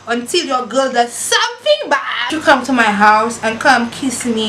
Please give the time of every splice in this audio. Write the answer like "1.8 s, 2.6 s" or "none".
2.3 s